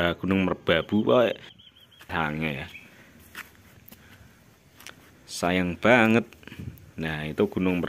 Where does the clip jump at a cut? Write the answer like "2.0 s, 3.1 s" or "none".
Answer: 1.7 s